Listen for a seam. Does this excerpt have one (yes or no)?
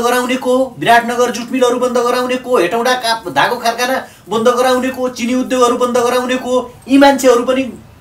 no